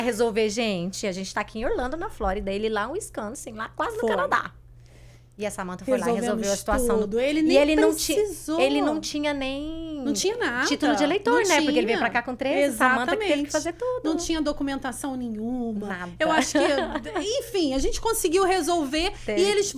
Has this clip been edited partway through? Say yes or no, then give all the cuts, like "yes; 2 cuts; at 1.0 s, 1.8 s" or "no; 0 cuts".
no; 0 cuts